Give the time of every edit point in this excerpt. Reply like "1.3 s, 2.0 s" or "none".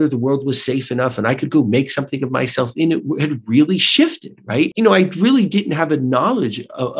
4.7 s